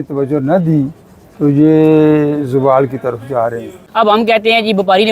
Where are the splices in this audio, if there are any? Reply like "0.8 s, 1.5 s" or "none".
3.8 s

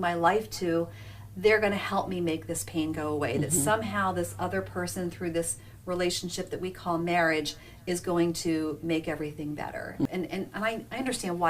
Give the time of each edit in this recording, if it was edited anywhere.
10.1 s

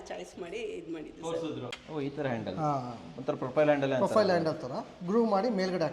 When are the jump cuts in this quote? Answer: 1.7 s

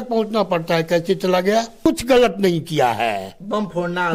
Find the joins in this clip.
1.7 s

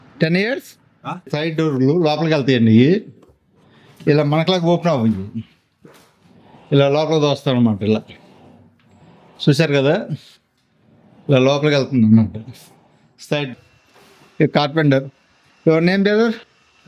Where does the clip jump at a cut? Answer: 1.3 s, 13.5 s

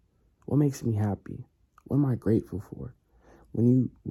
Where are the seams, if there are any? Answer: none

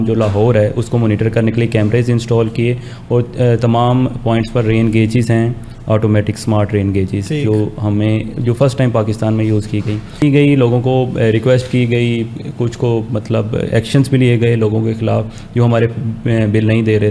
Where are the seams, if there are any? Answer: 10.2 s

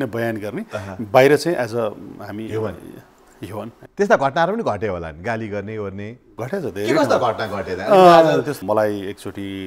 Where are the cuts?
3.8 s, 8.6 s

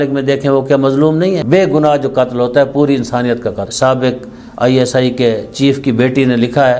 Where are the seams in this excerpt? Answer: 1.4 s, 3.7 s

